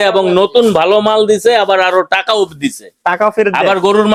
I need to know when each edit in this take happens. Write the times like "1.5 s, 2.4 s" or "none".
none